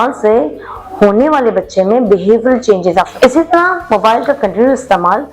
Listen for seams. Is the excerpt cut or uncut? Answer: cut